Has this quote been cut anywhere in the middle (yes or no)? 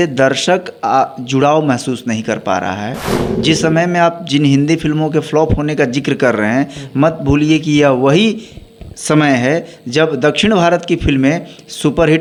no